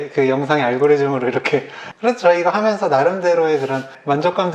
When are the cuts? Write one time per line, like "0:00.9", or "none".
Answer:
0:01.8